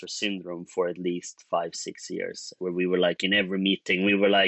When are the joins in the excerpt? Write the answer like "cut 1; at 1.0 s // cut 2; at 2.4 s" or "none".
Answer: cut 1; at 2.5 s